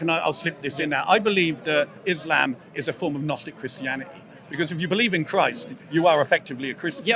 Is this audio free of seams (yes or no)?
yes